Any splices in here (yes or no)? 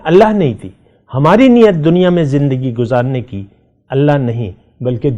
no